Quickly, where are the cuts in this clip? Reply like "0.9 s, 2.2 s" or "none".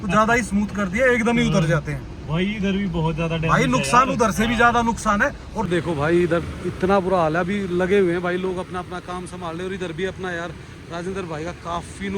5.5 s